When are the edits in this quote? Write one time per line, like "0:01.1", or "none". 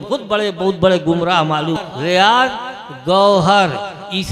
0:01.8